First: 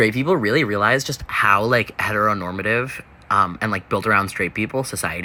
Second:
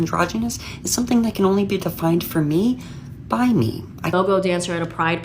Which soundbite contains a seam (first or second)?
second